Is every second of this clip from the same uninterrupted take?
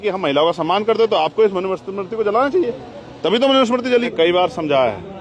no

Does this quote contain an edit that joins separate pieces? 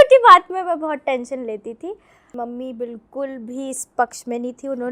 yes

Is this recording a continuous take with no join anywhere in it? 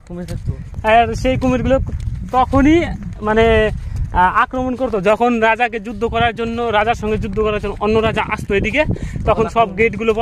yes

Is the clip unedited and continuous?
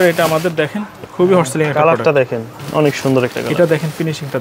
no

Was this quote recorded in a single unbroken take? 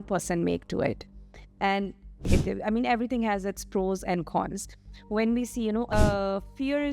no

